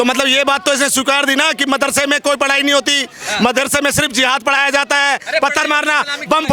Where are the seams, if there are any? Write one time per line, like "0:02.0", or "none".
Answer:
none

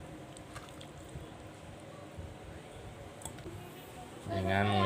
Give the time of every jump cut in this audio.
0:03.4

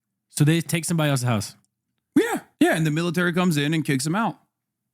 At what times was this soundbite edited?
0:02.5

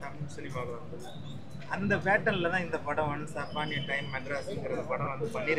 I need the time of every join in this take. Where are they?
none

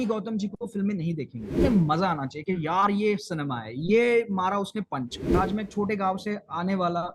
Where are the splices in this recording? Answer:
0:01.6
0:05.2

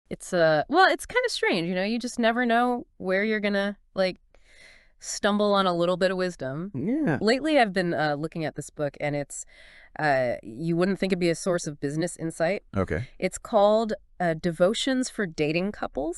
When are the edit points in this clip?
0:01.3

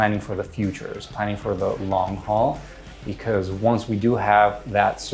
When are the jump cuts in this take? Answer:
none

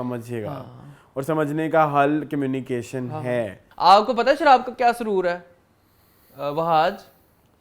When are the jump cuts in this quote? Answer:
0:03.6

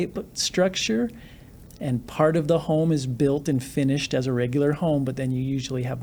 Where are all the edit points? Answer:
none

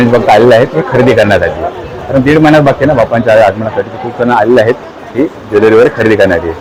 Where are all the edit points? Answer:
none

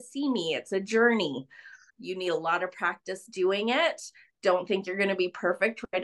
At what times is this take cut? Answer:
0:01.8

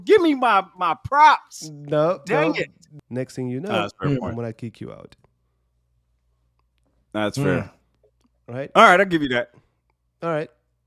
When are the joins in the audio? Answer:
0:02.8

